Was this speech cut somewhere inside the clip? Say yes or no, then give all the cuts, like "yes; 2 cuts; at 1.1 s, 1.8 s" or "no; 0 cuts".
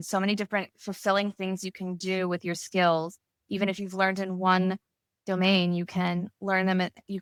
no; 0 cuts